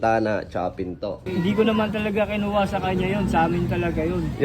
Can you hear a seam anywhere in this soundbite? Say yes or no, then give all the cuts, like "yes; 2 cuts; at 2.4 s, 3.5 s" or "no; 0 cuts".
yes; 1 cut; at 1.3 s